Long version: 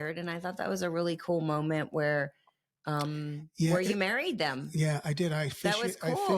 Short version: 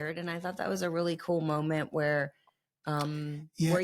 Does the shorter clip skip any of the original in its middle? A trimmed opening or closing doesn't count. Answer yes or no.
no